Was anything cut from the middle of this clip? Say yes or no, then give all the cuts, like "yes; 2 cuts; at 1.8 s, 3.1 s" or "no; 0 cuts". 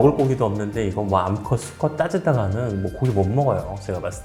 no; 0 cuts